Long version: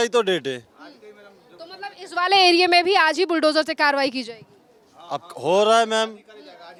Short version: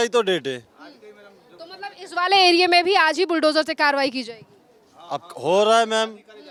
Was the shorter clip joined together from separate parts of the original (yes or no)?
no